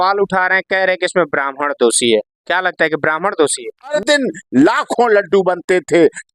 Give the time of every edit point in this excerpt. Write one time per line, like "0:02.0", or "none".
0:03.9